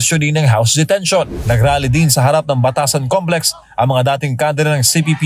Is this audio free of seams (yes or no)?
no